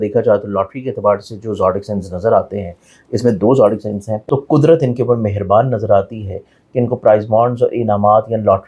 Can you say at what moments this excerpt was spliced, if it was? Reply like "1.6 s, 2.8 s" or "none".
4.1 s